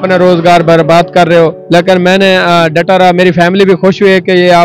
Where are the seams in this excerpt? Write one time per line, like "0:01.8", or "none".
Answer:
0:01.6

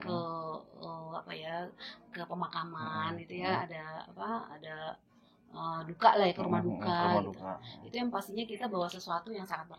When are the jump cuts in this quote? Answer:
none

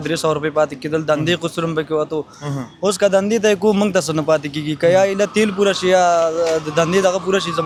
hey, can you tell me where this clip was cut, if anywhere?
none

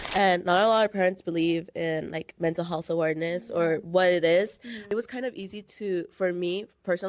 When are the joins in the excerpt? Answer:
0:04.8

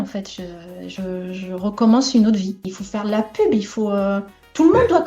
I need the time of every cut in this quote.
0:02.8

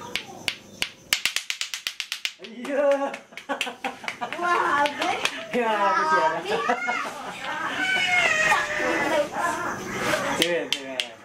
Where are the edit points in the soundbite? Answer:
0:02.5

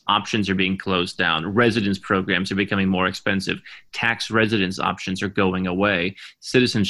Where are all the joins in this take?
none

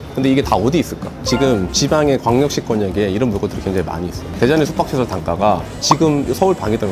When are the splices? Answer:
none

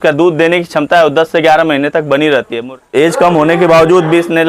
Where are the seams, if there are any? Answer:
0:02.6

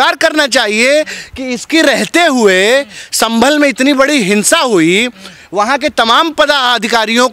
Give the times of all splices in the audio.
none

